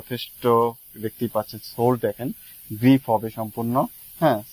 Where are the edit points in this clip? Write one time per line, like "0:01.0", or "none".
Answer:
none